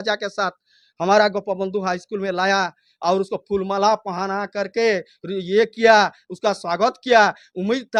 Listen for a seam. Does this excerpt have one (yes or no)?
no